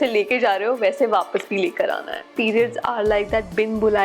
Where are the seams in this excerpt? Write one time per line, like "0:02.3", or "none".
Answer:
0:02.3

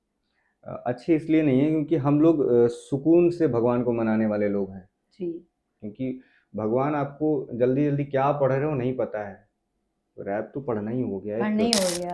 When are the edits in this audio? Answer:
none

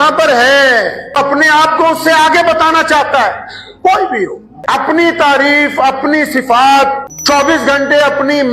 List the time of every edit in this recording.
0:01.2
0:04.9
0:07.1

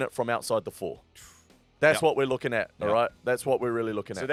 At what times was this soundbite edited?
none

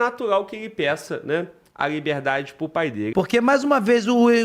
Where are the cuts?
0:03.0

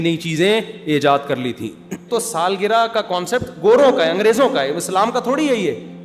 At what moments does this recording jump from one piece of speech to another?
0:02.1

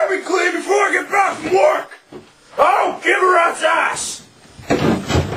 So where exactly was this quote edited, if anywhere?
none

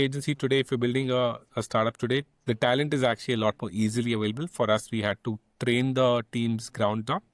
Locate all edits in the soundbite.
none

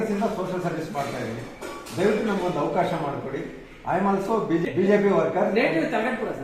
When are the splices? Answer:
0:04.6

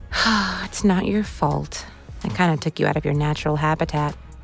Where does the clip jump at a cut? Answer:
none

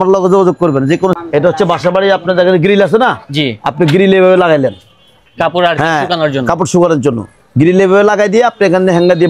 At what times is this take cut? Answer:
0:01.1

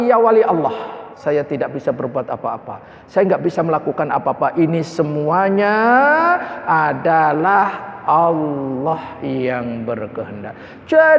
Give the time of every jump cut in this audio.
0:01.1

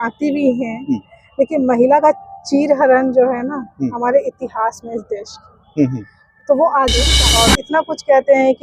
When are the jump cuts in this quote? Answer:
0:07.2

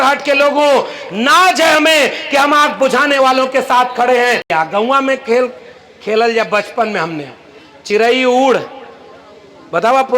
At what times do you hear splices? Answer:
0:04.5

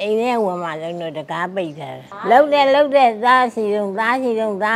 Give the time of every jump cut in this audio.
0:02.1

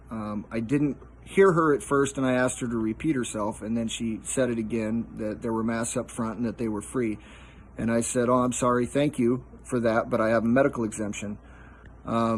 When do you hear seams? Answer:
none

